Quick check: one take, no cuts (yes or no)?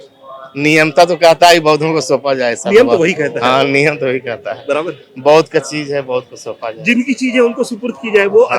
yes